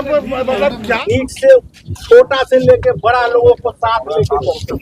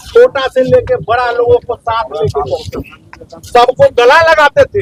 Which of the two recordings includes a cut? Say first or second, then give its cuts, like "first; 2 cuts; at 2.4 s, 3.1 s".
first; 1 cut; at 1.0 s